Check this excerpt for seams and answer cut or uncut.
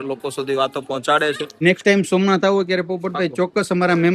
cut